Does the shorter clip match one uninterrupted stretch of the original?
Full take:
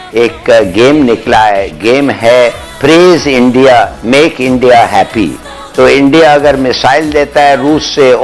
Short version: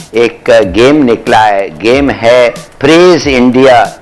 yes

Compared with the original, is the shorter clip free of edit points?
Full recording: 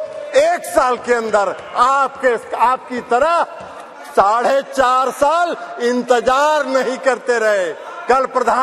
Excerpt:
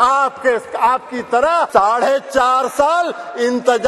no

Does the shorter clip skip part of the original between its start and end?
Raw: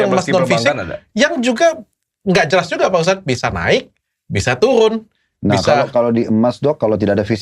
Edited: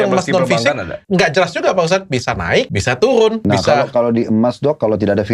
yes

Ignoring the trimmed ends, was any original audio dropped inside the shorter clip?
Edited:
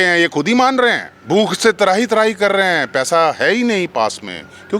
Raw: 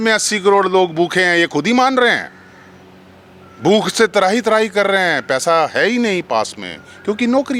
yes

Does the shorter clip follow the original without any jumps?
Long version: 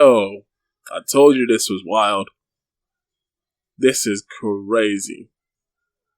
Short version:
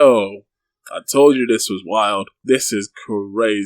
no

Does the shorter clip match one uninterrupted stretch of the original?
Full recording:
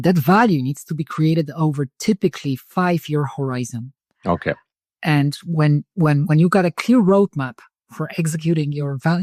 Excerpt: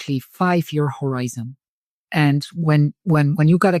no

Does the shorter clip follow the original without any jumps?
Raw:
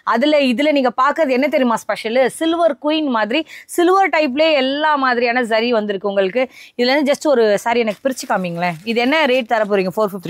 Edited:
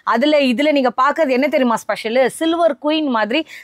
yes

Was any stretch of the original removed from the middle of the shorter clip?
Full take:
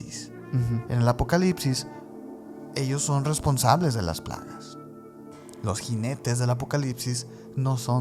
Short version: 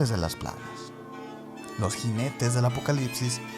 no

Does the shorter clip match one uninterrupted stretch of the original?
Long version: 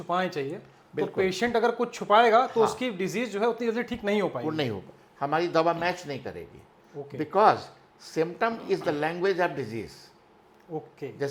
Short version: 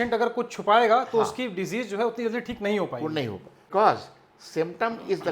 no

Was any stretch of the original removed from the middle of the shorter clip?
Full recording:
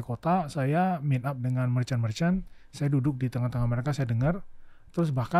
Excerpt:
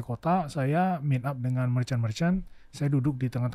no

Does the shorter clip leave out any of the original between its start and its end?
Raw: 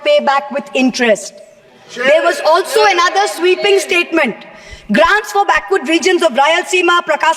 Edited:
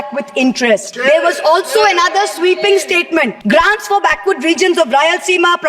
yes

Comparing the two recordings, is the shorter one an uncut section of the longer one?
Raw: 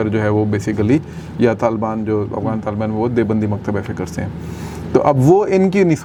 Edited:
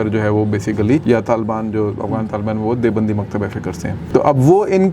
no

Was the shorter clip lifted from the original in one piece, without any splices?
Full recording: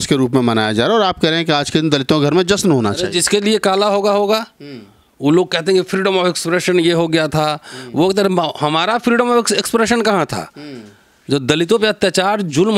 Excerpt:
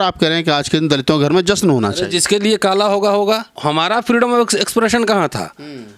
no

